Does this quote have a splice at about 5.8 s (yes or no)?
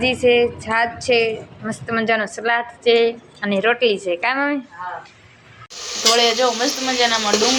yes